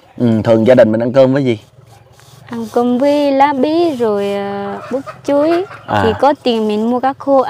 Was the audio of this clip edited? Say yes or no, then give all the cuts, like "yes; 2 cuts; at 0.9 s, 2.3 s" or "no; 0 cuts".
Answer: no; 0 cuts